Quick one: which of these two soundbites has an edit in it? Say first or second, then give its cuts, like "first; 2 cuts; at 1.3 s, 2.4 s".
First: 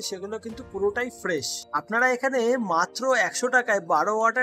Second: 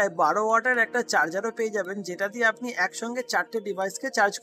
first; 1 cut; at 1.8 s